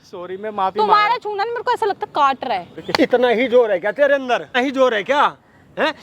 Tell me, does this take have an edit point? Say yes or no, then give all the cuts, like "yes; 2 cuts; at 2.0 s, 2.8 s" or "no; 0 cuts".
yes; 2 cuts; at 2.8 s, 4.6 s